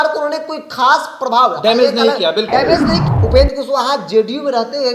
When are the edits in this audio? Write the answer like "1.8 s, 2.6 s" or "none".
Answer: 3.0 s